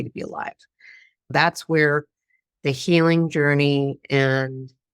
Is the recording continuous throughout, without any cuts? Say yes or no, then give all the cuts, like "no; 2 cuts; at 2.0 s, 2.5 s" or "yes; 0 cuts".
no; 1 cut; at 1.3 s